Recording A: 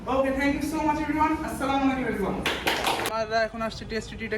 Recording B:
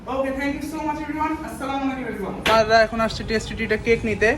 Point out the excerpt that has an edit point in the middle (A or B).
B